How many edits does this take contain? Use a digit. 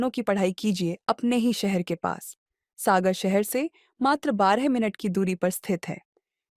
0